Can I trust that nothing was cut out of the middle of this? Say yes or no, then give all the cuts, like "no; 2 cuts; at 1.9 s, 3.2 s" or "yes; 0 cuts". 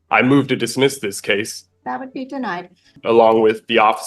no; 2 cuts; at 1.6 s, 3.0 s